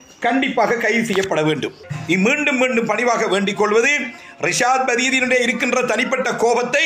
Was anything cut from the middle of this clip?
yes; 1 cut; at 1.9 s

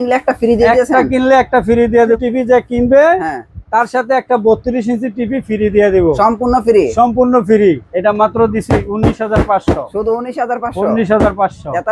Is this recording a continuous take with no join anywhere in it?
no; 2 cuts; at 2.2 s, 7.9 s

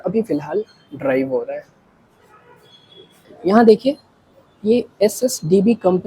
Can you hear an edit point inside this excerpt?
yes; 1 cut; at 3.3 s

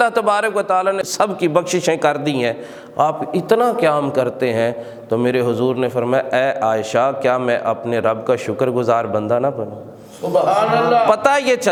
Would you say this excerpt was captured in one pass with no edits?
yes; 0 cuts

